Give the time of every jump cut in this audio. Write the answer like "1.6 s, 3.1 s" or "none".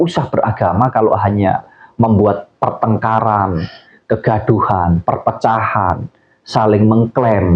none